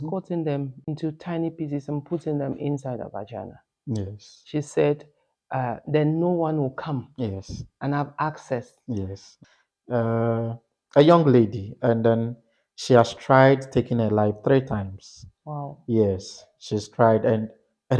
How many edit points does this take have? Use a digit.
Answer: 1